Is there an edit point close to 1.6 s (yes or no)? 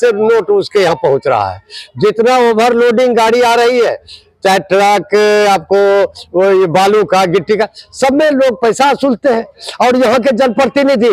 no